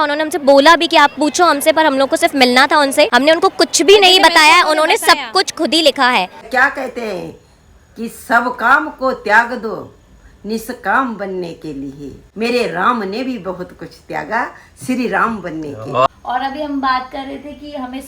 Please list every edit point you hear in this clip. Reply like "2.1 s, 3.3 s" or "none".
3.1 s, 6.3 s, 12.2 s, 16.1 s